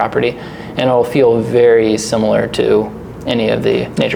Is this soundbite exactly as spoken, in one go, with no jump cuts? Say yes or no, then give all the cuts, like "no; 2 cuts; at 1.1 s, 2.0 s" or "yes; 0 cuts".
yes; 0 cuts